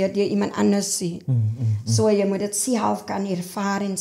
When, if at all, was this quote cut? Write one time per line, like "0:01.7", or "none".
none